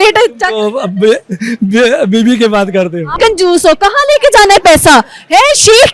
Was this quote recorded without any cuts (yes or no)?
no